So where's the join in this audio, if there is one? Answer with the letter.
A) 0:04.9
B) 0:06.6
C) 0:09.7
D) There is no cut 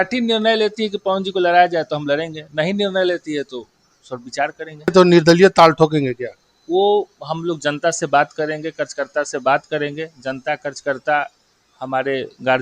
A